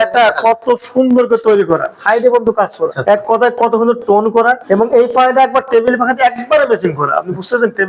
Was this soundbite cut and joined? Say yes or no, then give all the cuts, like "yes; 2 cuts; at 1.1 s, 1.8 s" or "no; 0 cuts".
yes; 3 cuts; at 1.9 s, 3.0 s, 4.6 s